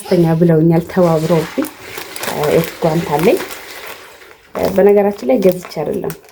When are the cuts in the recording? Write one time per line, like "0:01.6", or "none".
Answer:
none